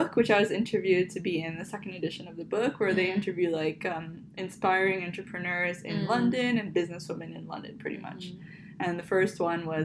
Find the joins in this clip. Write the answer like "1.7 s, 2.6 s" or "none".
none